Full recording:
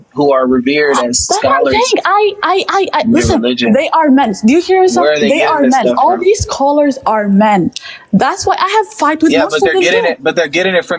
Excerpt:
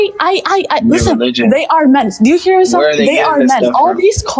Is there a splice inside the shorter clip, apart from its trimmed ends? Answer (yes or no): no